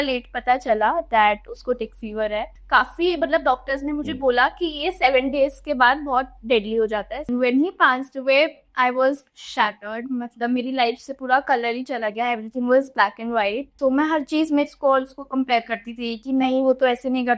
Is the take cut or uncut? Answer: cut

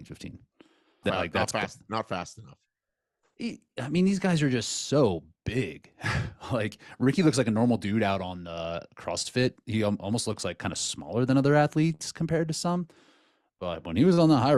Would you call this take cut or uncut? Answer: cut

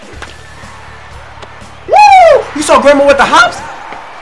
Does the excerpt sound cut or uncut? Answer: uncut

